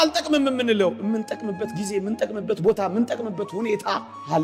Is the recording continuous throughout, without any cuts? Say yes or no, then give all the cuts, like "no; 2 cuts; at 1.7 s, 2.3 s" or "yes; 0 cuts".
yes; 0 cuts